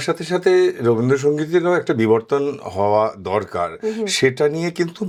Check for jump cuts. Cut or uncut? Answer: uncut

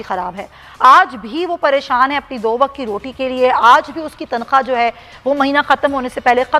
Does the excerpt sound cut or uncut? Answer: uncut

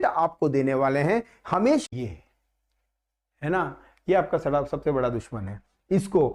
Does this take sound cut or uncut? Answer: cut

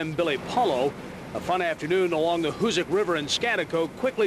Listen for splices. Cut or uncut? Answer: uncut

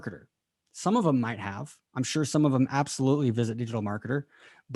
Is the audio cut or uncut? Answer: uncut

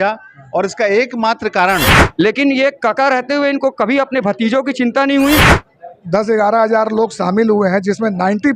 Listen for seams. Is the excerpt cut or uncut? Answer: cut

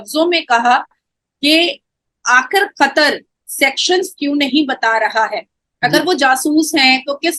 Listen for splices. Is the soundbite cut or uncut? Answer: uncut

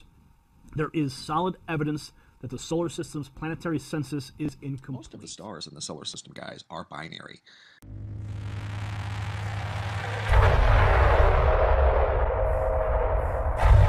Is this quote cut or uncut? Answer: uncut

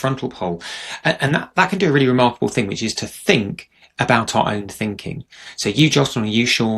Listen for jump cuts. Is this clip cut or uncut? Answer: uncut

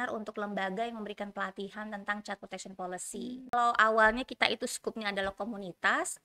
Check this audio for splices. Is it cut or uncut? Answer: cut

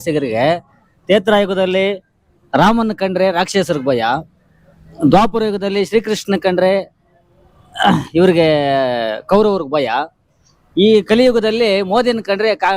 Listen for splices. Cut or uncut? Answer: uncut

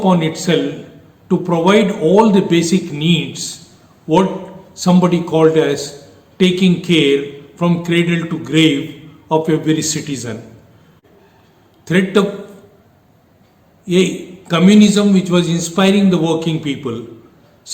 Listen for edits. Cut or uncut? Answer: cut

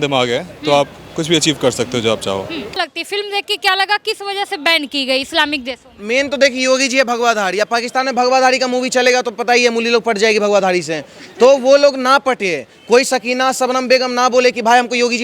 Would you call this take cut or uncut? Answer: cut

